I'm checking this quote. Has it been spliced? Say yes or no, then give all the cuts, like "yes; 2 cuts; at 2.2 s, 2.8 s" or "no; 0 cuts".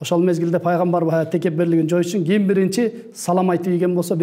no; 0 cuts